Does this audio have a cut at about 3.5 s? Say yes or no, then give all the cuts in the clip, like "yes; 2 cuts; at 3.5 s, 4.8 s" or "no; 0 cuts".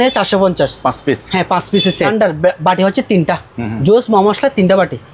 no; 1 cut; at 2.1 s